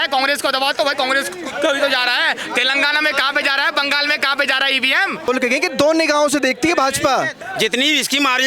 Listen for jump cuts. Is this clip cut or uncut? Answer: cut